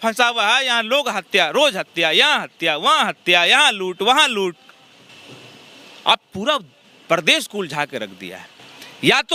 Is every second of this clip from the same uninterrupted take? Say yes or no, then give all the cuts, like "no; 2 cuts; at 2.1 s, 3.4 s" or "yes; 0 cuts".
yes; 0 cuts